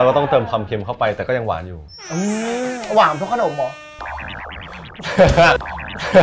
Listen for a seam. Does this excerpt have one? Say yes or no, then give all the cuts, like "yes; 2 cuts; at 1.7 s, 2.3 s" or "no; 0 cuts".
no; 0 cuts